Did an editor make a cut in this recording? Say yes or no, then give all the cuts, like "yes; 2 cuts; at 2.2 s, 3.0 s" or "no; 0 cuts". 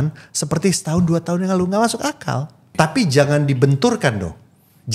yes; 1 cut; at 2.6 s